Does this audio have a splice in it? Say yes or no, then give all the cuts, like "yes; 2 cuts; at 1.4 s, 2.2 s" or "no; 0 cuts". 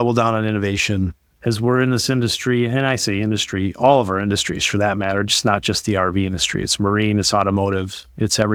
no; 0 cuts